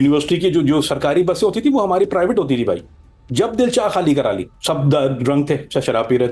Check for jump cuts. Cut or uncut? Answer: cut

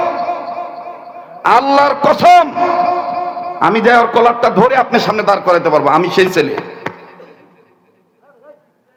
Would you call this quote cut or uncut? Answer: uncut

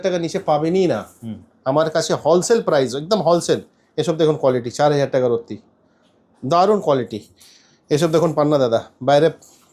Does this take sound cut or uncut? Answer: uncut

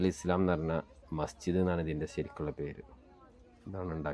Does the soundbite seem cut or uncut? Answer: uncut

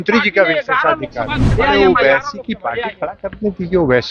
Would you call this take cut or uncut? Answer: cut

